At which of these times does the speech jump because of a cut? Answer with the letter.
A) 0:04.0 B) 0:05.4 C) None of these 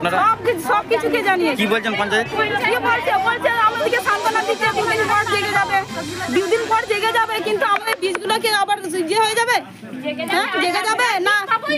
C